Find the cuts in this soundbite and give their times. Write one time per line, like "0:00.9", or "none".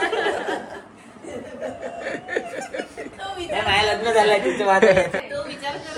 0:03.2
0:05.2